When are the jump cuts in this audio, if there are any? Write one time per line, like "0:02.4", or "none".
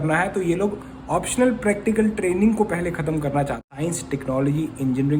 0:03.6